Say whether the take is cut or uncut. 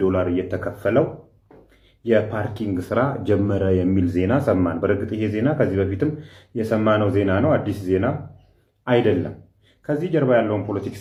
uncut